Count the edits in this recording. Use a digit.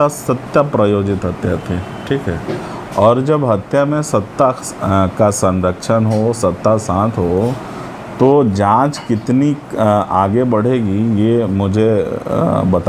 0